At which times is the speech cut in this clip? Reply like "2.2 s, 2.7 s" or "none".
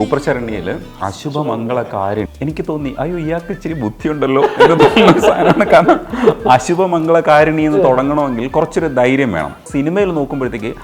0.9 s, 2.3 s, 9.6 s